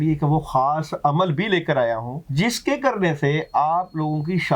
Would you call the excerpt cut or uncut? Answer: cut